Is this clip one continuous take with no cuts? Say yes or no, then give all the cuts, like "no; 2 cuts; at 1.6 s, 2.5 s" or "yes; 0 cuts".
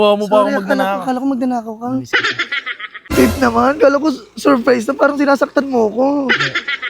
no; 1 cut; at 2.9 s